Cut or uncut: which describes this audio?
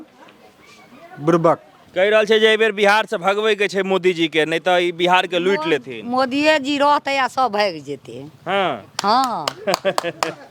cut